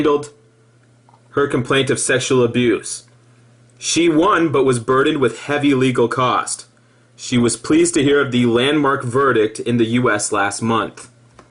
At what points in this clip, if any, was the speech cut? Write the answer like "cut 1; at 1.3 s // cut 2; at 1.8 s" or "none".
cut 1; at 6.5 s